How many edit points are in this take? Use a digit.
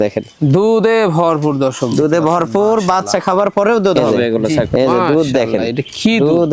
1